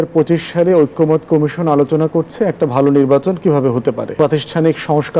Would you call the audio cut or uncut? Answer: cut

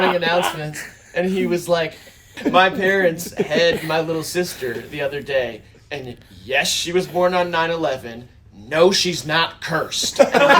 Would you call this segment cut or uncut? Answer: cut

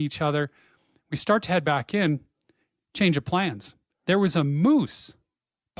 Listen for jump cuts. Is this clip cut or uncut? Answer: uncut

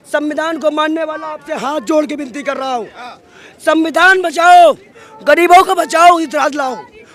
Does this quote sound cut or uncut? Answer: uncut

